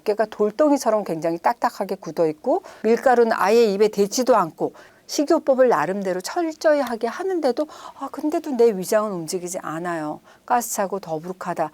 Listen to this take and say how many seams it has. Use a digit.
1